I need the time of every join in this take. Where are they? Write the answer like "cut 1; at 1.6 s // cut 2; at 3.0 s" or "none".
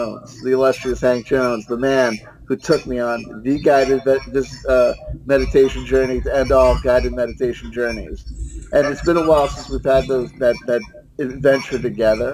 none

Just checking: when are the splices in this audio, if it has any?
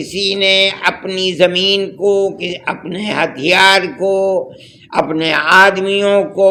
none

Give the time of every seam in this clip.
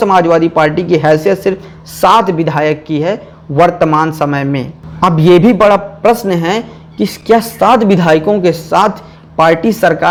none

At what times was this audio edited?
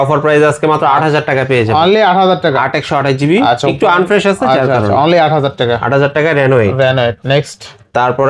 none

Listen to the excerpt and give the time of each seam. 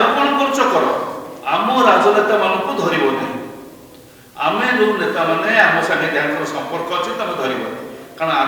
none

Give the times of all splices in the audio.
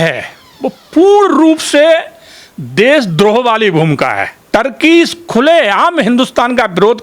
cut 1; at 4.3 s

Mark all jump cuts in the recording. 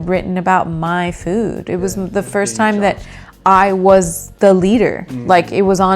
cut 1; at 4.2 s

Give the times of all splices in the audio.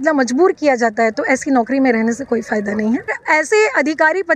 cut 1; at 3.2 s

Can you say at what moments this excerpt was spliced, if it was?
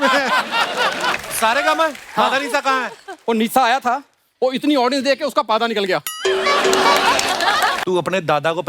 cut 1; at 1.2 s // cut 2; at 7.8 s

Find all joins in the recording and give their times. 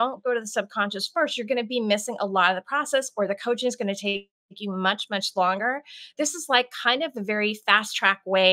none

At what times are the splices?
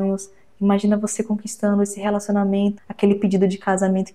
cut 1; at 2.8 s

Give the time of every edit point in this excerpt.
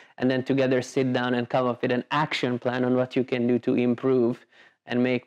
none

